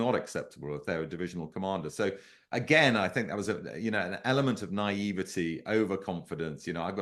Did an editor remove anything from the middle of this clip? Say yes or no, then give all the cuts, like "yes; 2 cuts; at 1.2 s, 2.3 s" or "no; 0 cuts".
no; 0 cuts